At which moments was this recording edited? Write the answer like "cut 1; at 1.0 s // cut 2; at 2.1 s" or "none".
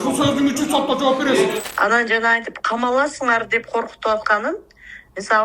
cut 1; at 1.6 s